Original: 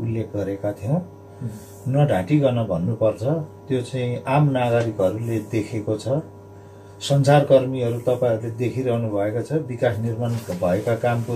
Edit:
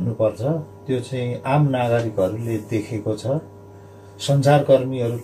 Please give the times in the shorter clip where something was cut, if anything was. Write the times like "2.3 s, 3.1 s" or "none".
none